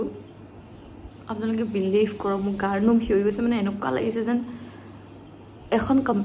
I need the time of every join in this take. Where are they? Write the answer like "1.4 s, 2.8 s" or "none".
none